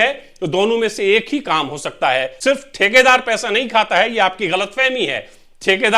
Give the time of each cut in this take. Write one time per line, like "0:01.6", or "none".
0:02.3